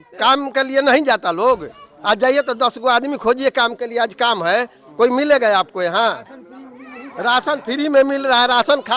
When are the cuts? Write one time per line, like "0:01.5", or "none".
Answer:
none